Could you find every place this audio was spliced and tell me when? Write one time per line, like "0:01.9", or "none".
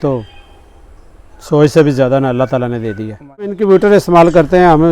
0:03.5

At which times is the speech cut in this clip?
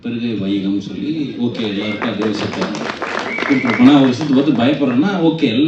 none

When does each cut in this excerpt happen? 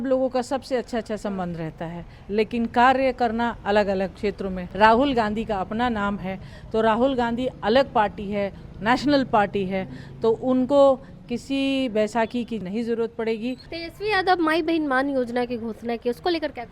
0:04.6
0:12.6
0:13.7

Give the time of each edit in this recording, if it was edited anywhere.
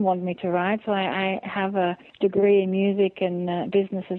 0:02.1

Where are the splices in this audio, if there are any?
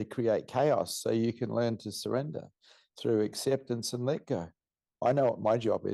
0:05.0

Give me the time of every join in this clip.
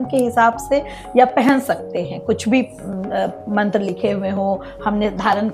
none

